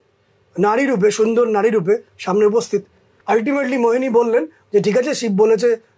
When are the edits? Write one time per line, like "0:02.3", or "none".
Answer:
0:03.1